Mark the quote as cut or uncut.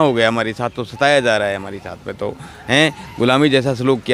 uncut